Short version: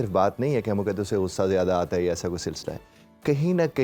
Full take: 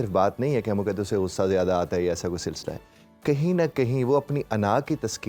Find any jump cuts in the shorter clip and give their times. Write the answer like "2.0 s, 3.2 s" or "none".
none